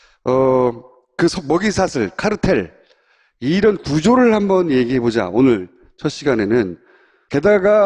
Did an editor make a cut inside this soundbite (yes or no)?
no